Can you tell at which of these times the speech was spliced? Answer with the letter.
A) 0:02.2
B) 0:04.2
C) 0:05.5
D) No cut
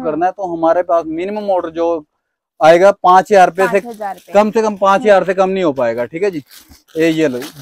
D